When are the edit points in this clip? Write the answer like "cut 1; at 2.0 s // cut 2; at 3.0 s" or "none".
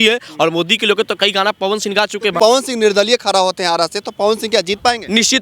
cut 1; at 2.4 s